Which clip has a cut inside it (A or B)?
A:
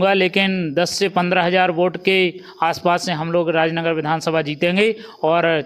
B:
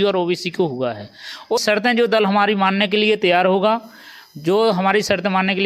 B